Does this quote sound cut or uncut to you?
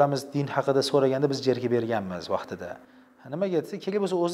uncut